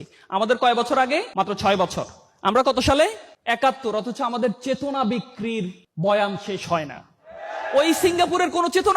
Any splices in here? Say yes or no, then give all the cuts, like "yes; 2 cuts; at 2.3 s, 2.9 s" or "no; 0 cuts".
yes; 2 cuts; at 1.3 s, 3.3 s